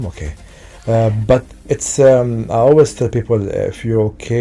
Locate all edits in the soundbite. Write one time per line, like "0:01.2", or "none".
none